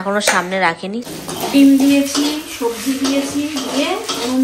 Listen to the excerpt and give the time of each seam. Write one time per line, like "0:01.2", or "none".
0:01.1